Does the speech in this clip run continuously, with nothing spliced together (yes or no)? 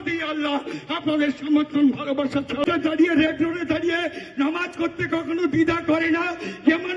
no